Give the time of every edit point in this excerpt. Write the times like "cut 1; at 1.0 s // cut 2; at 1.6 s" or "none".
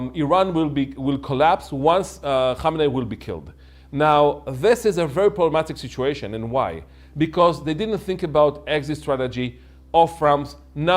none